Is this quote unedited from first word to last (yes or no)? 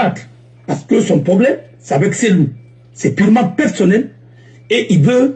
yes